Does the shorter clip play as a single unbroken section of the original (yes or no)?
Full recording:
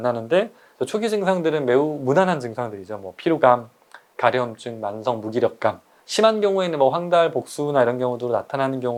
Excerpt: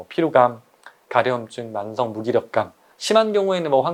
yes